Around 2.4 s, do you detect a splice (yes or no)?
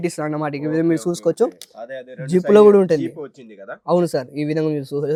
no